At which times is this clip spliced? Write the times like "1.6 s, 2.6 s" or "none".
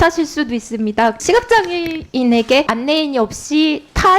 1.2 s, 2.7 s